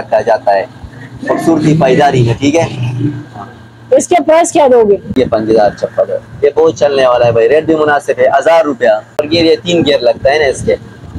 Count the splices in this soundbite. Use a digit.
2